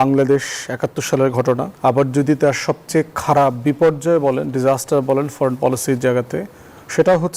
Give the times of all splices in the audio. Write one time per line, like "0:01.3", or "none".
0:01.7